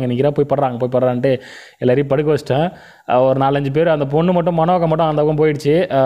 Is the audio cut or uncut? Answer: uncut